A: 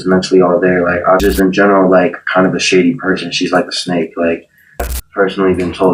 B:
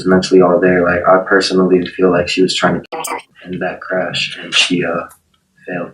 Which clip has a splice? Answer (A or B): A